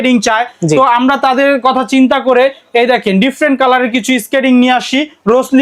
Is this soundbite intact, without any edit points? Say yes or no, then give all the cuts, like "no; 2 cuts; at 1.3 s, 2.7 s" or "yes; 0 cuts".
yes; 0 cuts